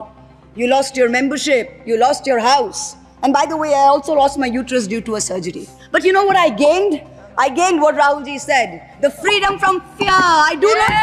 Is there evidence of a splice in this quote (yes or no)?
no